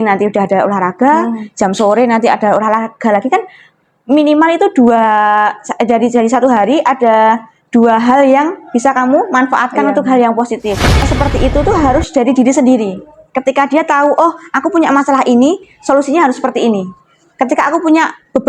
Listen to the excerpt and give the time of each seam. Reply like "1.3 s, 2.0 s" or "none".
11.1 s